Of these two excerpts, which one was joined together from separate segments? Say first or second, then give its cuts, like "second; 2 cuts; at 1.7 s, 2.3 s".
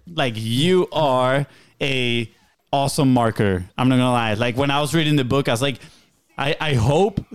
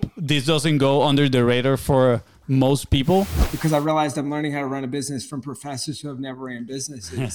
second; 1 cut; at 3.4 s